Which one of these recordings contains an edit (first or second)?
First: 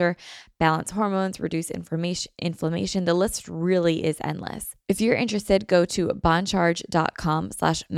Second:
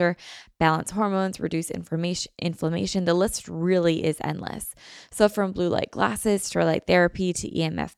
first